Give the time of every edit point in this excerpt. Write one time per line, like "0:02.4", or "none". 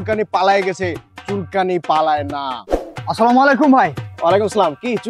0:02.6